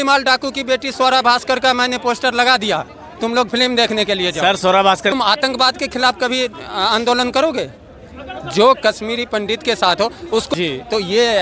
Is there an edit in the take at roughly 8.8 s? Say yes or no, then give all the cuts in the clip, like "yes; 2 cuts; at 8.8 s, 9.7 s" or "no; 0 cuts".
no; 2 cuts; at 5.1 s, 10.5 s